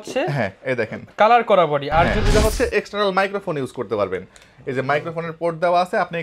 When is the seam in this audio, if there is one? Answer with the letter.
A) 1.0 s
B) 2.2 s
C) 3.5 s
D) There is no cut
B